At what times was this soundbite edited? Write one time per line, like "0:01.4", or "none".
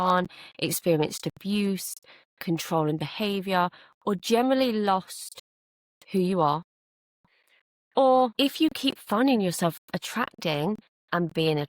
0:08.3